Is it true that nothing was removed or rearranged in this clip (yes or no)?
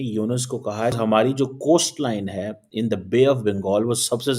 no